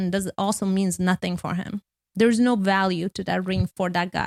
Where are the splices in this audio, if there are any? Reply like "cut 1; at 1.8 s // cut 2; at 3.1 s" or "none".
none